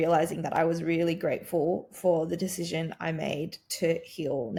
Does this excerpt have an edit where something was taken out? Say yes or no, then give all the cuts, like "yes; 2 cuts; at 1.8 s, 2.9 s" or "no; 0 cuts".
no; 0 cuts